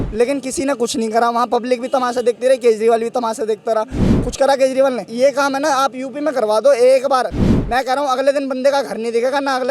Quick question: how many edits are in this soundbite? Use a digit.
1